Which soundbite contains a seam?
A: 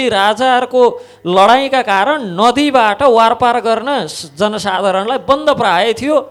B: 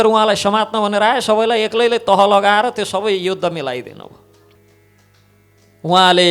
B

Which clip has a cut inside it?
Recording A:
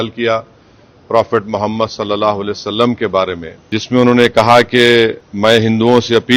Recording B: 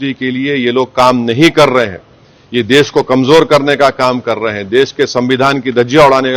A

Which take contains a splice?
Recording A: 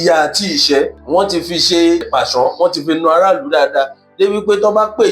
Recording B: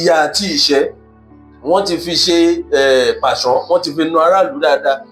A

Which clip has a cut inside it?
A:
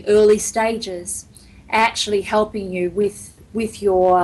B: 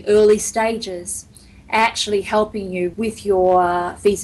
B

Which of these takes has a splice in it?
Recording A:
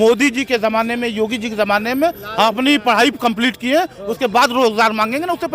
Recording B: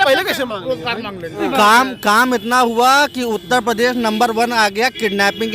B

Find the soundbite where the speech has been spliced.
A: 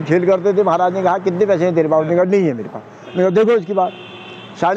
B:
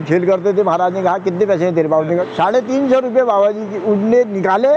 B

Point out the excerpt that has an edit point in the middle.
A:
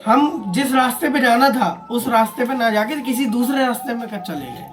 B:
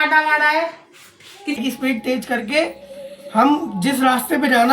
B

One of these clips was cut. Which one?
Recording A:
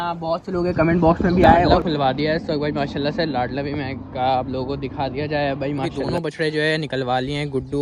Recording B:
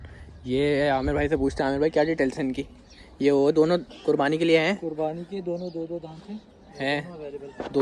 A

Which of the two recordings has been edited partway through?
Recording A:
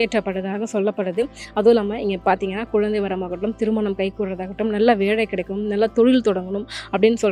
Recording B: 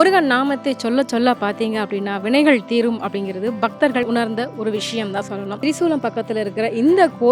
B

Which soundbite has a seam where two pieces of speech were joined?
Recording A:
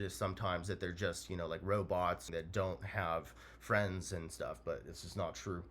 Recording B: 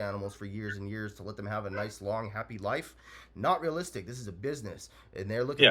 A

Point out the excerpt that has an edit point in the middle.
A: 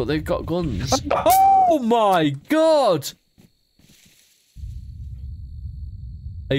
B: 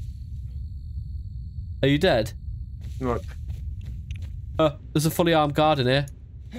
B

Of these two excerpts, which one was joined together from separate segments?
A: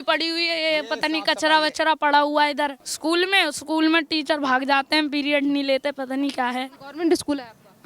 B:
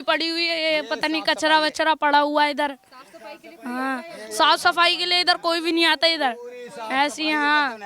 A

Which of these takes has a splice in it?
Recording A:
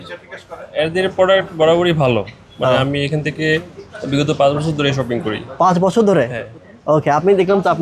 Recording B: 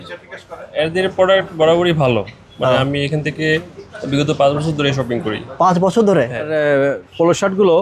B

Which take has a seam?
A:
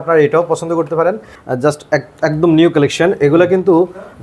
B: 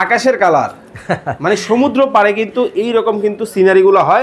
A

